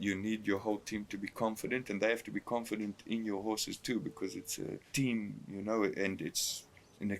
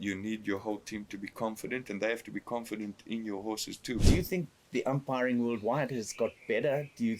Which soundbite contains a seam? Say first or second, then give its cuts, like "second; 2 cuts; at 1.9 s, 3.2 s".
second; 1 cut; at 4.0 s